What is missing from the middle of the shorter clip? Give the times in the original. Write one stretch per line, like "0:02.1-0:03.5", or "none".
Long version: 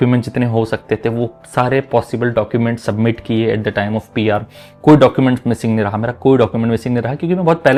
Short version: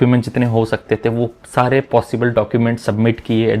none

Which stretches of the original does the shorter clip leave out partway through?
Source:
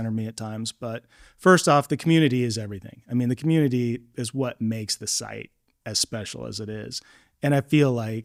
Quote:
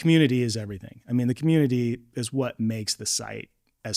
none

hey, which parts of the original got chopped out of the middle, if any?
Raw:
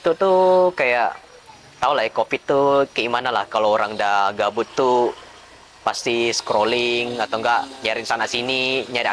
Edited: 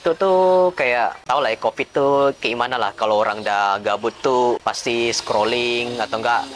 0:01.2-0:01.7
0:05.1-0:05.8

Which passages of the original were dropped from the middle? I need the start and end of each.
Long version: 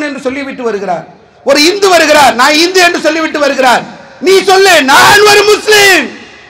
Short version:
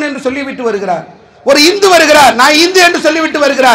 none

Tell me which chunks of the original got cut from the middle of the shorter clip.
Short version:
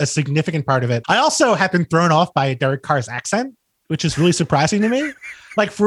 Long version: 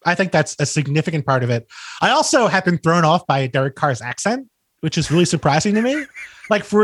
0:01.6-0:01.9

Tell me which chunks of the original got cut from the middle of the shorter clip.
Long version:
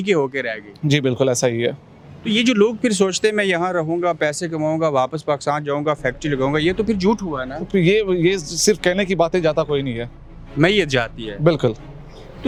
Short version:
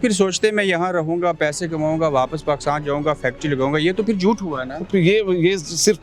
none

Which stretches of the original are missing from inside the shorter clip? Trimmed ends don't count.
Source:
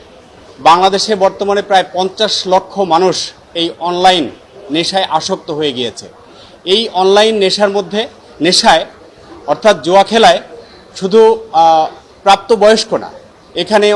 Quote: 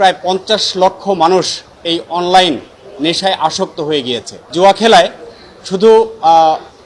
0:06.2-0:09.8

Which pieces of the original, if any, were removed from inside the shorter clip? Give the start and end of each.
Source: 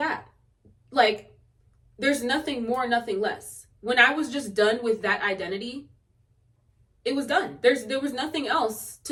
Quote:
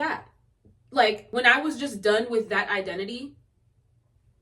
0:01.2-0:03.8

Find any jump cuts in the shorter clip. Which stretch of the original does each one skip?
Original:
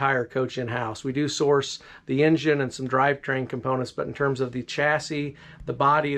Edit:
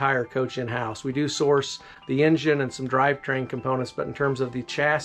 none

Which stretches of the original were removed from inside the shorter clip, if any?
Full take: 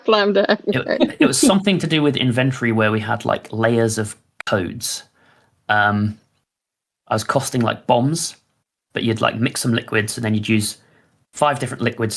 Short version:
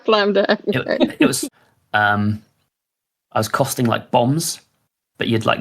0:01.4-0:05.1

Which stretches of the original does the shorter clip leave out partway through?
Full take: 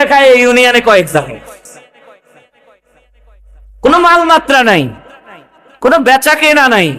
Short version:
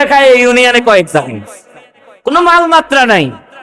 0:02.3-0:03.9

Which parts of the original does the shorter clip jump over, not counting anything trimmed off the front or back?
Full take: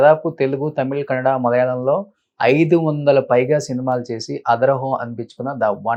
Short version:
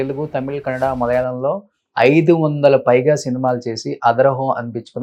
none

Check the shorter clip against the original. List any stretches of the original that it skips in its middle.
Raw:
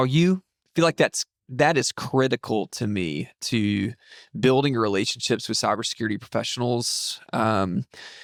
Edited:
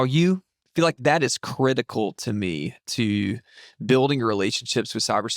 0:00.9-0:01.5

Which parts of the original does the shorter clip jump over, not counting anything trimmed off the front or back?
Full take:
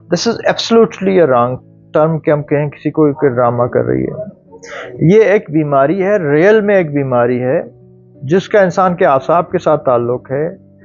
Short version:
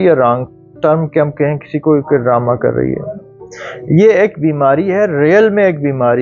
none

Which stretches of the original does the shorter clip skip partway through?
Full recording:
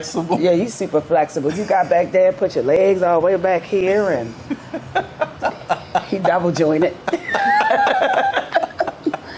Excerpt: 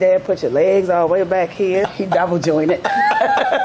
0:04.0-0:06.0
0:07.0-0:07.3

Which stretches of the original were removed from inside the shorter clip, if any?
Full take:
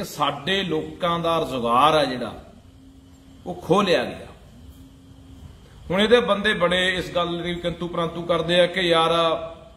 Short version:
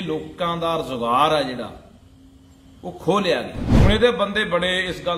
0:04.2-0:05.7

